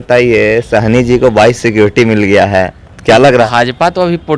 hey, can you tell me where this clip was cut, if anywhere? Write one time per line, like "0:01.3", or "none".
0:03.5